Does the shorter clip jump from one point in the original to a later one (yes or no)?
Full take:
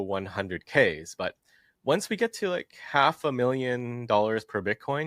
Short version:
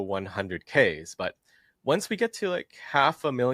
no